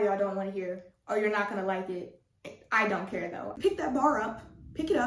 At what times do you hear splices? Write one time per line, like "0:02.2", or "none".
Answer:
0:03.6